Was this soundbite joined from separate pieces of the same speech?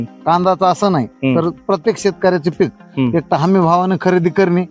no; 0 cuts

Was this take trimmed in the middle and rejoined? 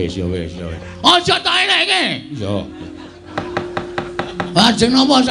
yes; 1 cut; at 3.3 s

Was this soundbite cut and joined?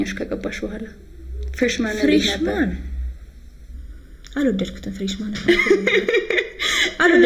no; 0 cuts

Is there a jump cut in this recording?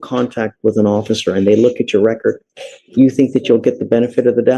no; 0 cuts

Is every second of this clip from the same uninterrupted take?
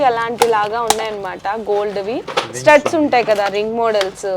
yes; 0 cuts

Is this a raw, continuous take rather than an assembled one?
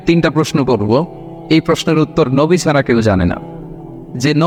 yes; 0 cuts

